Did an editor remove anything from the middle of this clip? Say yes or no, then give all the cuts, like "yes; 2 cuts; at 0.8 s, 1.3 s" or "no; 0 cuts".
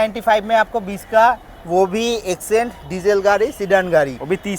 no; 0 cuts